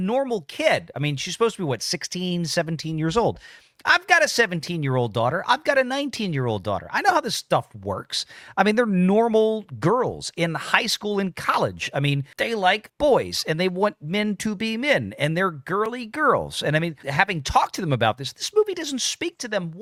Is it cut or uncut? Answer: uncut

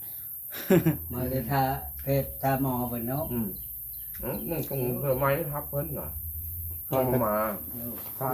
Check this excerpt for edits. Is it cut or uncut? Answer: uncut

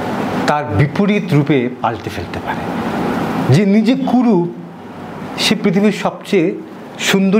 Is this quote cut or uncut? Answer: uncut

